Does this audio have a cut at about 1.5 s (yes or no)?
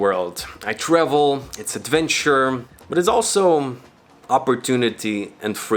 no